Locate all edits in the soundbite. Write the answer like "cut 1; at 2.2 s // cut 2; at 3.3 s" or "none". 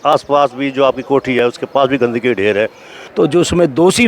cut 1; at 3.0 s